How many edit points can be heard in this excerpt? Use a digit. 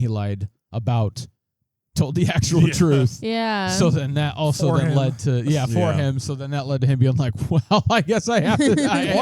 0